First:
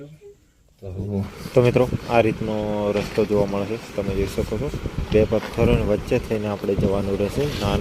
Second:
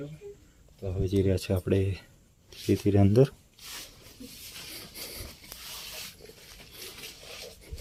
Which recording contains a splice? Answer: first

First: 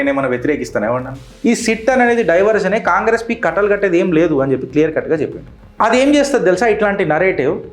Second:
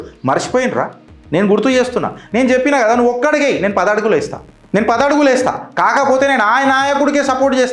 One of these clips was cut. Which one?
first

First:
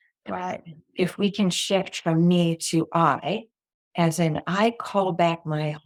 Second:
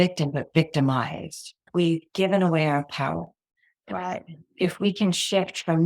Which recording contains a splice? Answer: second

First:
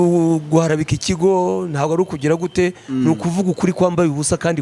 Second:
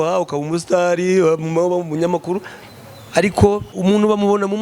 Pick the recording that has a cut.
second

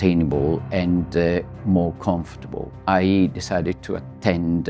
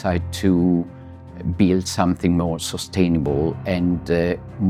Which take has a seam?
first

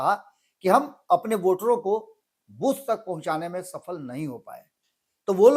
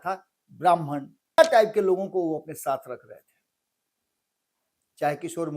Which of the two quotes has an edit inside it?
second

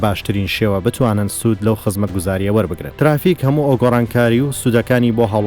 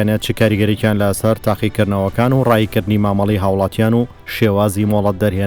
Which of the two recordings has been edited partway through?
first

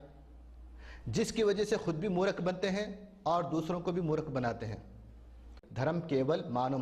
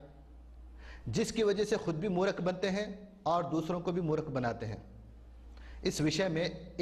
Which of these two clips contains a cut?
first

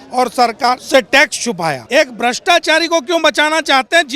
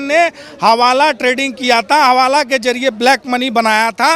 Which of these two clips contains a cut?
first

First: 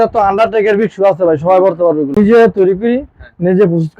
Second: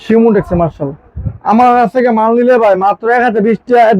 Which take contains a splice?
first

